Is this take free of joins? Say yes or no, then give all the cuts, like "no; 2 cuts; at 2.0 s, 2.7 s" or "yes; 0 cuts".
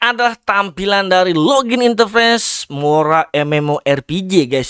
yes; 0 cuts